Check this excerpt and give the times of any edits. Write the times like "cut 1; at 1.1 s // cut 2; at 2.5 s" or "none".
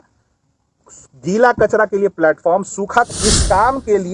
cut 1; at 3.1 s